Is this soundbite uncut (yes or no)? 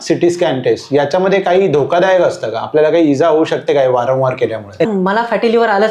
no